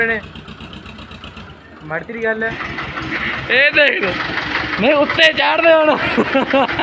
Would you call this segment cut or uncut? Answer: cut